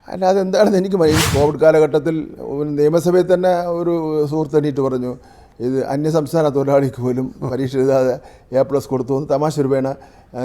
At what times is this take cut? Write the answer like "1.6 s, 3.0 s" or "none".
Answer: 1.2 s